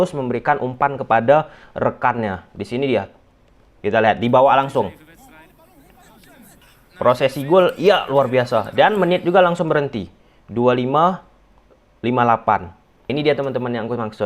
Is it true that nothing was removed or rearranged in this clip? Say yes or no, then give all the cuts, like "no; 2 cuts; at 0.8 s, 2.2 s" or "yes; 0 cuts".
no; 2 cuts; at 6.7 s, 13.1 s